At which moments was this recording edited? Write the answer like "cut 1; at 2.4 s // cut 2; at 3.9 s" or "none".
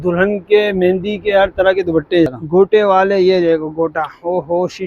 cut 1; at 2.3 s